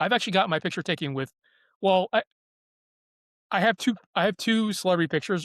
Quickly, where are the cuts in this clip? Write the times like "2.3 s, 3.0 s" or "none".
none